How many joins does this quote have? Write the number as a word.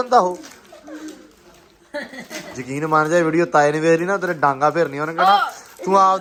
zero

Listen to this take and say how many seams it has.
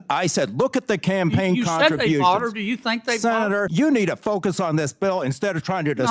one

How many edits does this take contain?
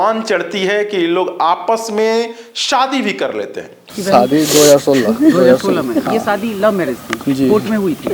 zero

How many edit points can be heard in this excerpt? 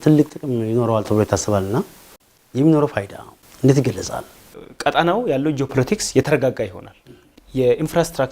two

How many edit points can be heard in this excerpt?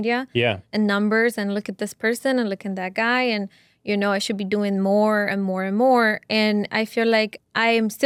zero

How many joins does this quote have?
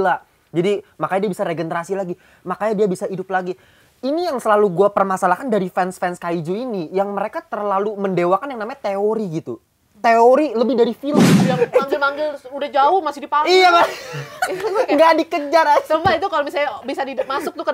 one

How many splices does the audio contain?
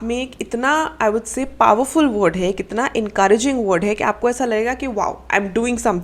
zero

